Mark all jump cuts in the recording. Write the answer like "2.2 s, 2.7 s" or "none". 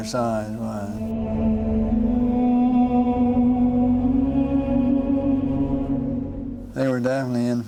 none